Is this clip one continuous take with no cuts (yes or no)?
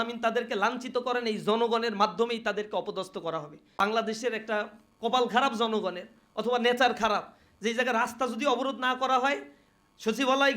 no